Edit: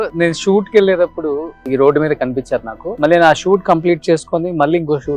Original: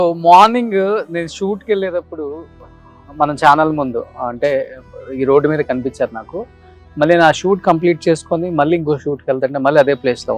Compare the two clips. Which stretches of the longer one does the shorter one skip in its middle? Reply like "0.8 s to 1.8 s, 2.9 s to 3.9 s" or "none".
2.5 s to 5.0 s, 6.3 s to 6.8 s